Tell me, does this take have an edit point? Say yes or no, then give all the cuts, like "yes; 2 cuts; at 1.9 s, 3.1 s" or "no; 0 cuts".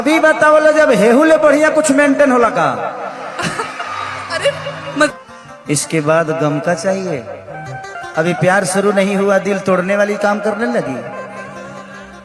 yes; 1 cut; at 5.1 s